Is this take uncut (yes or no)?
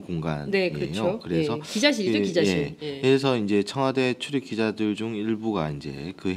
yes